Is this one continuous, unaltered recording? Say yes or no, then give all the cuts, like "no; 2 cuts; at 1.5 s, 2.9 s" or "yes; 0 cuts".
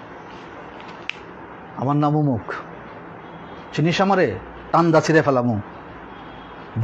no; 1 cut; at 1.3 s